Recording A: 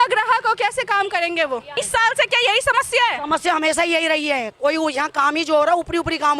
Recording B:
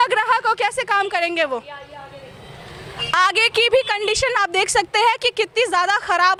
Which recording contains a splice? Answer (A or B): A